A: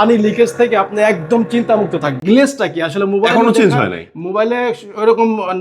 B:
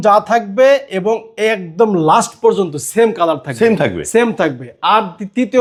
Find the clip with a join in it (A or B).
A